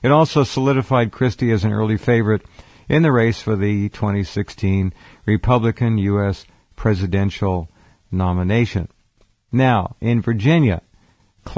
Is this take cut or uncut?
cut